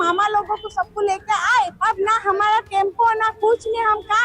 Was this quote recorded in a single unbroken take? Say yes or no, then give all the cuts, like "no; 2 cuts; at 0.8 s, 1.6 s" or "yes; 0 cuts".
no; 1 cut; at 1.8 s